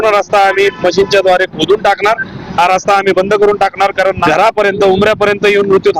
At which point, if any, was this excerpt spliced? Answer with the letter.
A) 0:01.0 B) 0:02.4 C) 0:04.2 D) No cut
C